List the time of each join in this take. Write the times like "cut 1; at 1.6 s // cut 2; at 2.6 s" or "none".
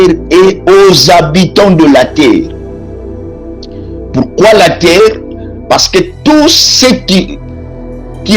cut 1; at 2.6 s // cut 2; at 3.9 s